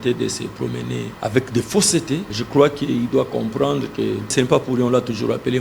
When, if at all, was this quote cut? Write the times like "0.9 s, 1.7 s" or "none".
1.1 s, 2.4 s, 4.3 s

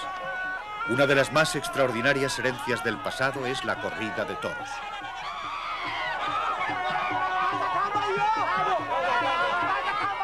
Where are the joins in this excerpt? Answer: 8.8 s

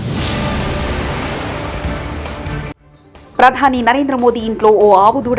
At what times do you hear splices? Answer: 2.8 s

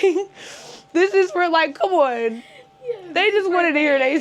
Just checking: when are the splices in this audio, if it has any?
none

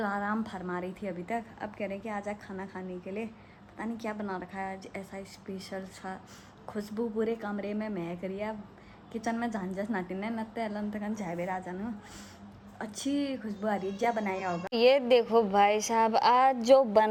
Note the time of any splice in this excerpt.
none

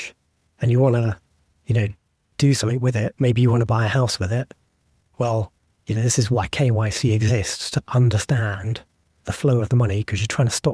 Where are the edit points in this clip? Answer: none

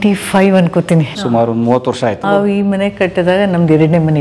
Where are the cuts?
1.2 s, 2.3 s

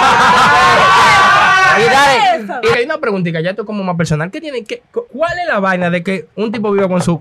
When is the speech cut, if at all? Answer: 2.7 s, 5.1 s, 6.3 s

